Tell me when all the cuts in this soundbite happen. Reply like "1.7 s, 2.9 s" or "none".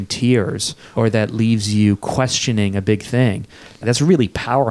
0.8 s, 3.8 s